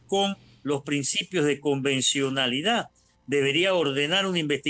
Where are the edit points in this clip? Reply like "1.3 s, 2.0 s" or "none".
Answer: none